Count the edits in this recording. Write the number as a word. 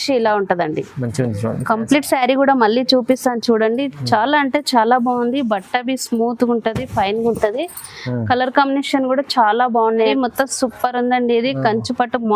one